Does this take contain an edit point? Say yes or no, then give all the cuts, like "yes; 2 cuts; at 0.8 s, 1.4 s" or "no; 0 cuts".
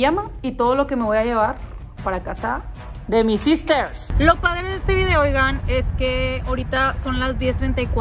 yes; 1 cut; at 3.9 s